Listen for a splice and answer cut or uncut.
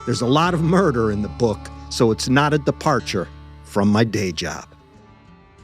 cut